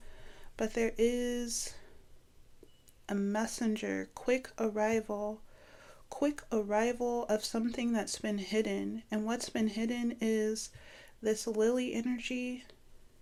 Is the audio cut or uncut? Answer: uncut